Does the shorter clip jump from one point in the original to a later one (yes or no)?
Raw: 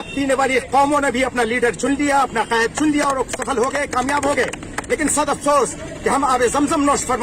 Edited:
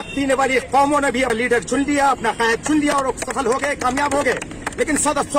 yes